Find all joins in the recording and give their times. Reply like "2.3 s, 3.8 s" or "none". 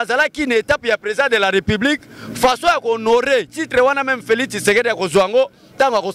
none